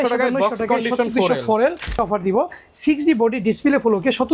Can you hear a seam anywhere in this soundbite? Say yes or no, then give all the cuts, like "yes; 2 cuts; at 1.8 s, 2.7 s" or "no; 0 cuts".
yes; 1 cut; at 1.9 s